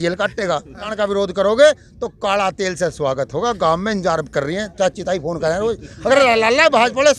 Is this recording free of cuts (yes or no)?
no